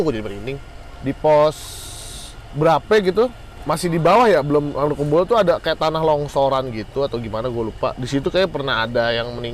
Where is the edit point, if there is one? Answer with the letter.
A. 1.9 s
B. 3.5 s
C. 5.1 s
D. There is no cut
B